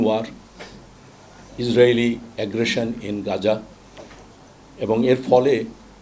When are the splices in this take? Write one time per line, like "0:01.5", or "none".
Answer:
none